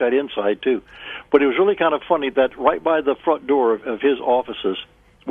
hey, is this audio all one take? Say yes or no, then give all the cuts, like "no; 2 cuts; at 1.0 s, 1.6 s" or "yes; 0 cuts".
yes; 0 cuts